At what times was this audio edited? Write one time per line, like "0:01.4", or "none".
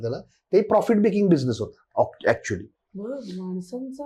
none